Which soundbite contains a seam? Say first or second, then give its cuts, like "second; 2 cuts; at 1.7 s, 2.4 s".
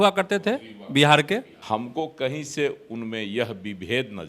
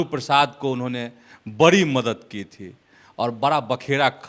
first; 1 cut; at 1.5 s